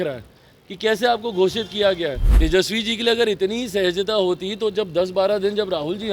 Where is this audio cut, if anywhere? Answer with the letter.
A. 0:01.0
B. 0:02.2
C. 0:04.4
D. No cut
B